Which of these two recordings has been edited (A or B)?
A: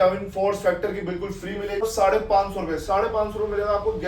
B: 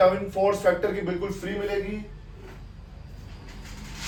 A